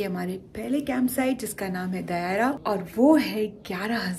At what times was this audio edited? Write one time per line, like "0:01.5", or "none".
0:02.6